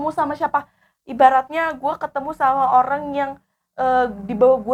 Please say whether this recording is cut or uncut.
uncut